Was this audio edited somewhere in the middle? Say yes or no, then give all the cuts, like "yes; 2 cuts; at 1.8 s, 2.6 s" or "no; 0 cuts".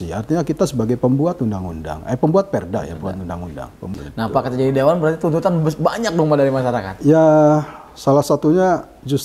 yes; 1 cut; at 3.8 s